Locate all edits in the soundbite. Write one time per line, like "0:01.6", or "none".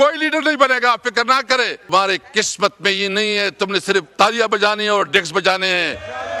0:01.9

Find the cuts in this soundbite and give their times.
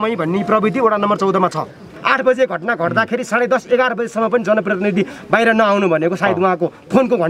0:01.9

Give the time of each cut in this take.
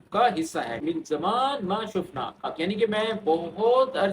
0:00.8
0:02.5

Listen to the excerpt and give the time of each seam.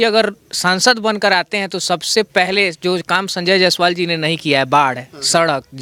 none

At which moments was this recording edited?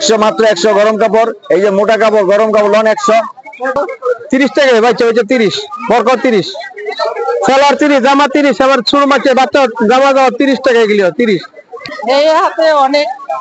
0:03.8
0:11.9

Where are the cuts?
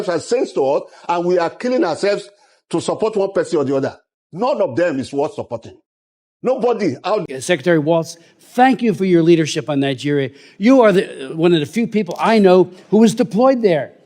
0:07.2

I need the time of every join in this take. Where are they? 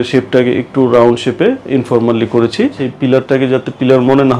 0:02.9

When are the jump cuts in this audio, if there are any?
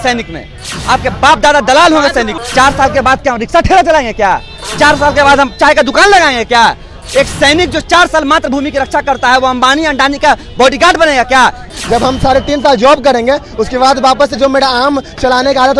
0:02.4
0:11.7

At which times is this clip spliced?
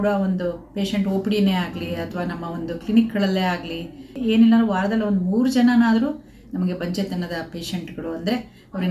0:04.2

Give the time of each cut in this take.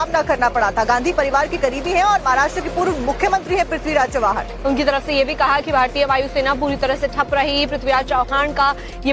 0:04.4

